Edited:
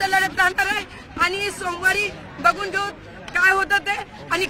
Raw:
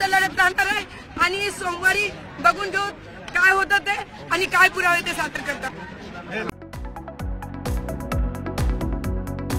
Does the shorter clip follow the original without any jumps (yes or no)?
yes